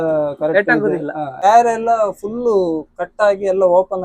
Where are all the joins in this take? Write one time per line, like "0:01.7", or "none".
0:01.3

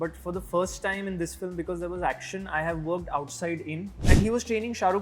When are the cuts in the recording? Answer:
0:04.1

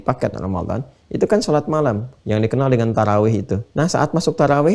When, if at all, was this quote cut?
0:02.1
0:03.6

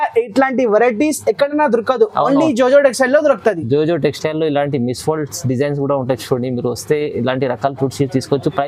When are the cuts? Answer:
none

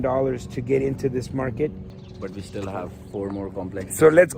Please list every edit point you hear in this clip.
0:01.9

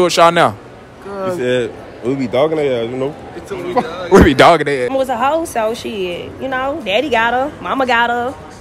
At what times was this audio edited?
0:04.9

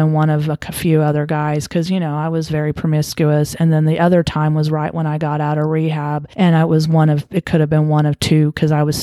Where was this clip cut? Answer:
0:06.2

